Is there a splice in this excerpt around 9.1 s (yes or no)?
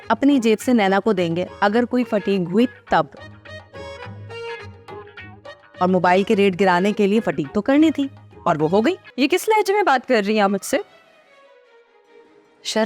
yes